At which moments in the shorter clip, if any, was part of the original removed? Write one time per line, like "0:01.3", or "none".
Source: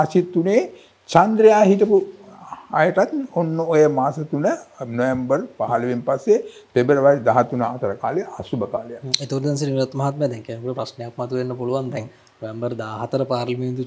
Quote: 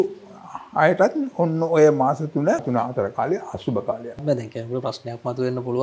0:02.7
0:04.2